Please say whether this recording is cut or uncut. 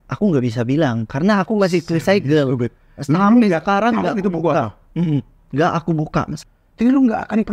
cut